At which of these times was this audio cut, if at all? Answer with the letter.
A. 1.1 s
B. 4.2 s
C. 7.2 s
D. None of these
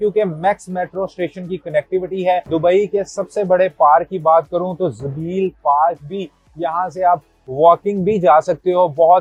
D